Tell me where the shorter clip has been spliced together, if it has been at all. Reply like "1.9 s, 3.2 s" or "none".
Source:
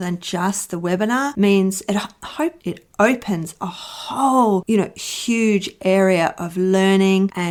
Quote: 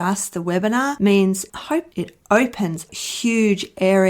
1.4 s, 3.0 s